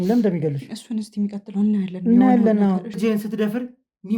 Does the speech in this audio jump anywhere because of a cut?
yes; 1 cut; at 2.9 s

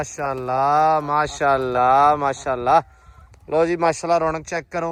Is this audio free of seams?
yes; 0 cuts

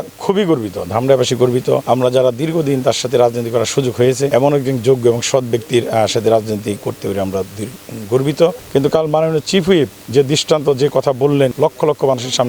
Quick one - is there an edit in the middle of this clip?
yes; 4 cuts; at 1.8 s, 4.3 s, 8.6 s, 11.5 s

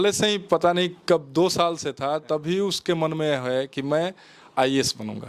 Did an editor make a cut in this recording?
no; 0 cuts

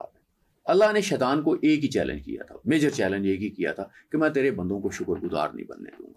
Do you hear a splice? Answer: no; 0 cuts

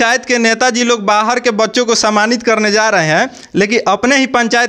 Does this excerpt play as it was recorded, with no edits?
yes; 0 cuts

